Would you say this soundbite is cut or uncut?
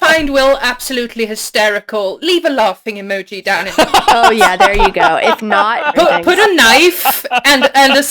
cut